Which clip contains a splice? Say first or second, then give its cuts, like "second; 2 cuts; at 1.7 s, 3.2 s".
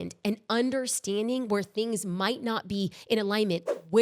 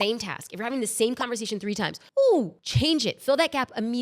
second; 2 cuts; at 2.0 s, 2.6 s